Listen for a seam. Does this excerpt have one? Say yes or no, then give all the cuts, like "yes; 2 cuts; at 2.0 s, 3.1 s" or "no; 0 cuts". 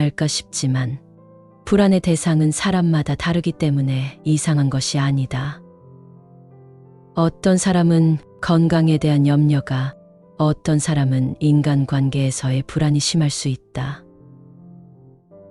yes; 1 cut; at 14.0 s